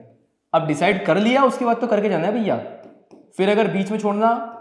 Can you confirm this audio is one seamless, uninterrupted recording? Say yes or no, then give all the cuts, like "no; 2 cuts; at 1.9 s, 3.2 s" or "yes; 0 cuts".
yes; 0 cuts